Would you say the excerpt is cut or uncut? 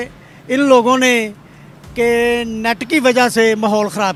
uncut